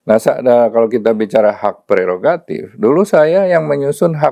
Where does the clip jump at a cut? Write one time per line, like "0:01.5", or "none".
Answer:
none